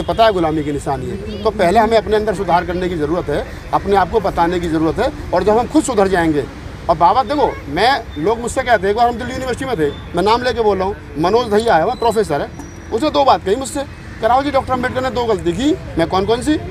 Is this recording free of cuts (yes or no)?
yes